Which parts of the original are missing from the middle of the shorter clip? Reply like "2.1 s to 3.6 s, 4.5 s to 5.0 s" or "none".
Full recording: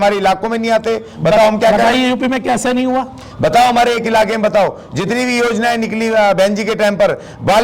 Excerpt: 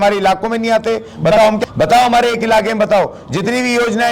1.6 s to 3.2 s